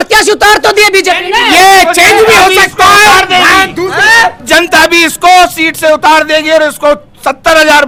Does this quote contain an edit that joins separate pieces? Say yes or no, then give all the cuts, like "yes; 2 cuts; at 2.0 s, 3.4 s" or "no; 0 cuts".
no; 0 cuts